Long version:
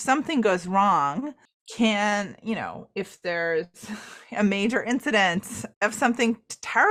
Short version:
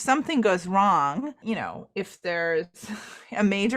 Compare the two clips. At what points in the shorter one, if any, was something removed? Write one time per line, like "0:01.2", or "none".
0:01.4